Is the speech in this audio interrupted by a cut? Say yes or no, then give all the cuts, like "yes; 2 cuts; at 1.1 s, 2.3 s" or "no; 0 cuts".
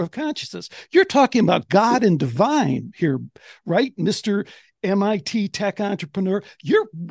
no; 0 cuts